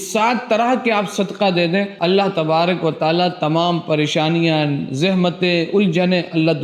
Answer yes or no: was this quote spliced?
yes